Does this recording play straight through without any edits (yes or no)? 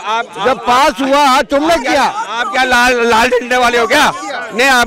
yes